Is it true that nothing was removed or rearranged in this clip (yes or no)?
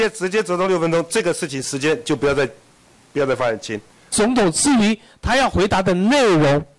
no